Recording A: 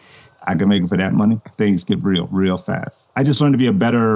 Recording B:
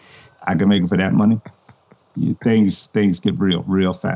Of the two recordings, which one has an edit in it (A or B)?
A